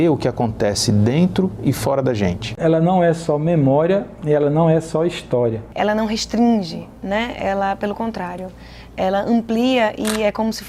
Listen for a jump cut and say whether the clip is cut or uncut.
cut